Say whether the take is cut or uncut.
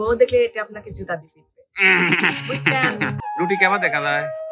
cut